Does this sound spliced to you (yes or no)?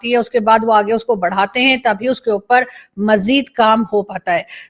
no